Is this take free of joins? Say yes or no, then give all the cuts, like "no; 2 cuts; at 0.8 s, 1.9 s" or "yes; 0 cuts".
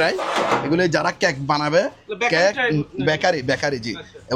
yes; 0 cuts